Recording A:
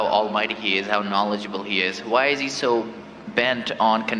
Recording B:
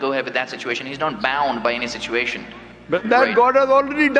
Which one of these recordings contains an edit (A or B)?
B